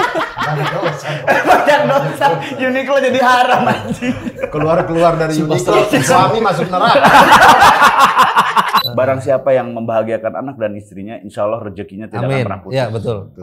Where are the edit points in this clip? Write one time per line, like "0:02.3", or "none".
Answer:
0:08.9